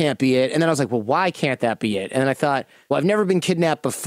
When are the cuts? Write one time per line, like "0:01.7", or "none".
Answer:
0:02.7